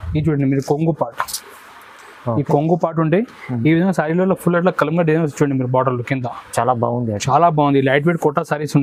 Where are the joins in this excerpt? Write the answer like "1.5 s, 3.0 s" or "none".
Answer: none